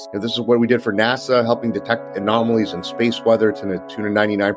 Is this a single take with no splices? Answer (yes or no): yes